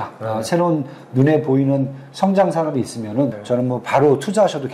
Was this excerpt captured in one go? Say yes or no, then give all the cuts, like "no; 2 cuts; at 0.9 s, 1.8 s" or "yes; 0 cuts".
no; 1 cut; at 3.4 s